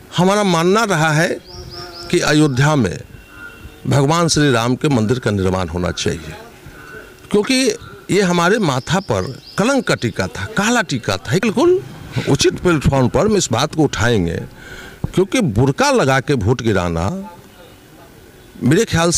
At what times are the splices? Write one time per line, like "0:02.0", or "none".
0:11.4